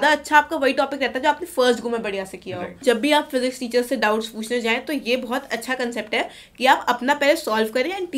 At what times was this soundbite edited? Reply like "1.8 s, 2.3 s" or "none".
2.8 s